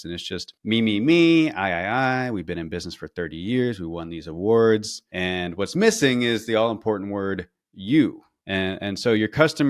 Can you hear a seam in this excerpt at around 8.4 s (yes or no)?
no